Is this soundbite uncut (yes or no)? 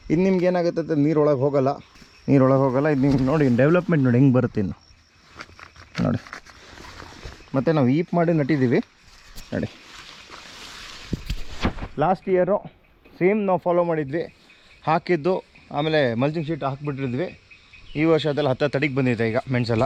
yes